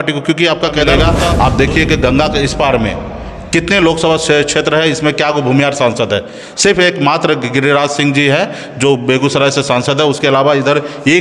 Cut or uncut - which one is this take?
cut